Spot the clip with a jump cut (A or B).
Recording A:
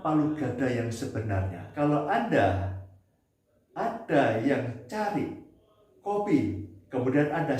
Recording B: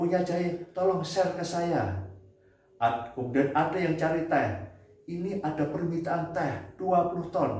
A